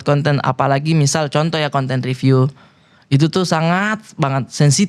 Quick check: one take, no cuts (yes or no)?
yes